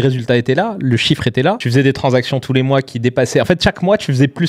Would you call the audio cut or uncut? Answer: cut